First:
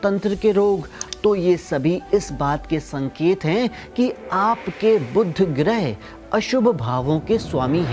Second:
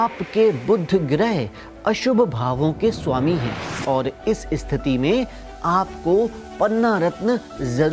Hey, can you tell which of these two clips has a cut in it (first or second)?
first